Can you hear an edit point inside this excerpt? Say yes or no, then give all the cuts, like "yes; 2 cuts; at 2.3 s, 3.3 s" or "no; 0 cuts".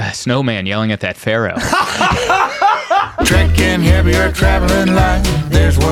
yes; 1 cut; at 3.1 s